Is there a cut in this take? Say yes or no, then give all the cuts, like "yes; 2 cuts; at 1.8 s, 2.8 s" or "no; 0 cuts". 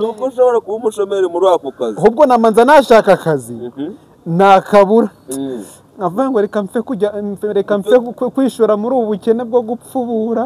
no; 0 cuts